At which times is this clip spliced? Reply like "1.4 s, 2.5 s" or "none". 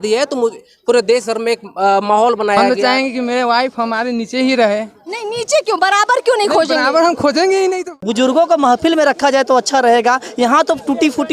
2.6 s, 7.8 s